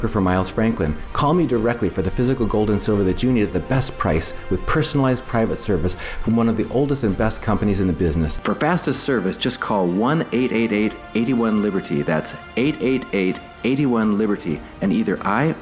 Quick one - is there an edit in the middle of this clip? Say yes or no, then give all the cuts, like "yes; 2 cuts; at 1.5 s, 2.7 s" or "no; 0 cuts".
yes; 1 cut; at 8.4 s